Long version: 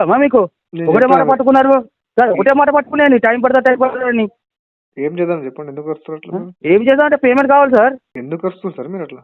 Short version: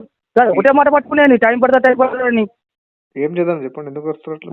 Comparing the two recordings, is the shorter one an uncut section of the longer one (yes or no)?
yes